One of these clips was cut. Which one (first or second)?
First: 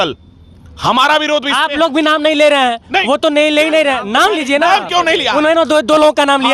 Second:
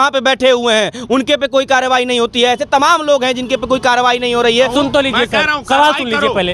second